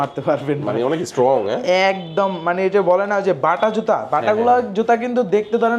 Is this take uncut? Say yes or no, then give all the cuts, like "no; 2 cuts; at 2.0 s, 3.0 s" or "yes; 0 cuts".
yes; 0 cuts